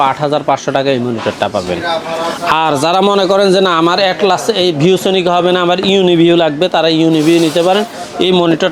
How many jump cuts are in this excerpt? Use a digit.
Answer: 0